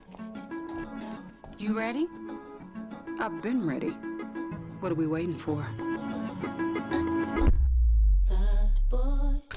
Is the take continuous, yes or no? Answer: yes